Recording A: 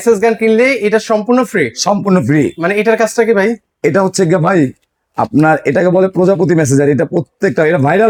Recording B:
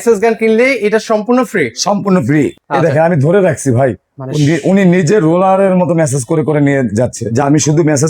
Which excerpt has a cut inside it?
B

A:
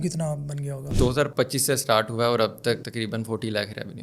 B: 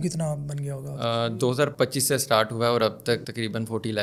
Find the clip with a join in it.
A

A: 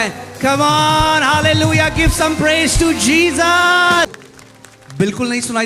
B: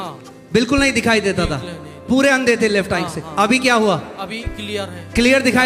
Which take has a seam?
A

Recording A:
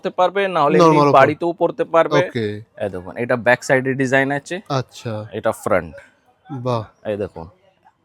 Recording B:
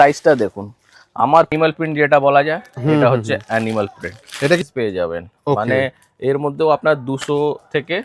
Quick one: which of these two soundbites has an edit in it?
B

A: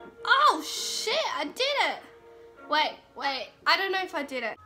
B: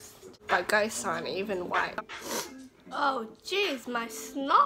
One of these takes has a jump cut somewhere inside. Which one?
B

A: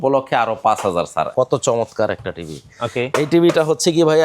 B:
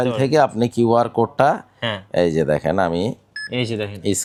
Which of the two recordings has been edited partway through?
A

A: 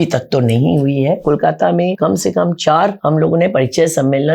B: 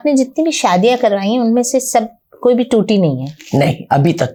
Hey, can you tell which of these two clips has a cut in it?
A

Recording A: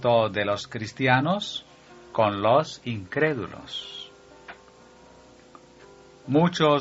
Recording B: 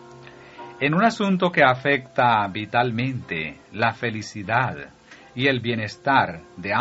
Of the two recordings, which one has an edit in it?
B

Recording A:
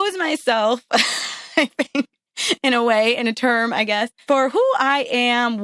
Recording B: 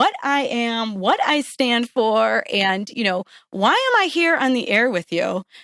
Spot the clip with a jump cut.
A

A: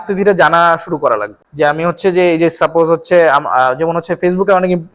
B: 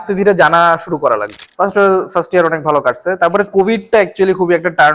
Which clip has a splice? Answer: B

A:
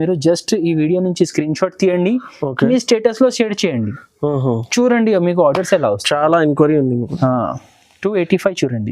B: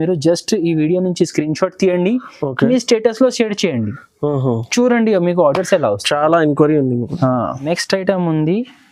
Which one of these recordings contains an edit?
B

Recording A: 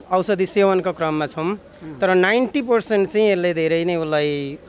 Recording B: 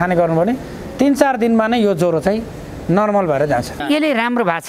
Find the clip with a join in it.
B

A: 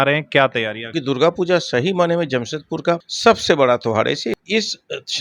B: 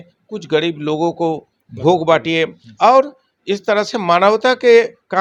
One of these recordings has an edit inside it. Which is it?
A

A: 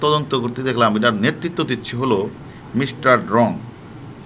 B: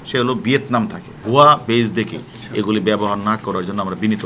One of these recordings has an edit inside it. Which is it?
B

